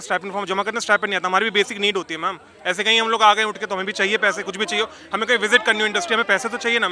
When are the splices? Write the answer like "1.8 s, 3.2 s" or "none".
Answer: none